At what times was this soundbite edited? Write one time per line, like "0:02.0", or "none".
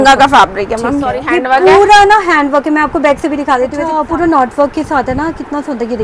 0:01.2
0:03.8